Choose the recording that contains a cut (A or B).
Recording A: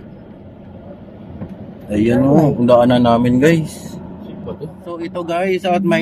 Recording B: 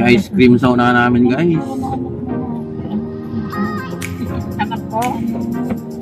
A